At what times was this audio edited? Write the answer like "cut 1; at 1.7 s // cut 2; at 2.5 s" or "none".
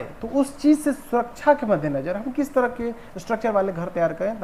none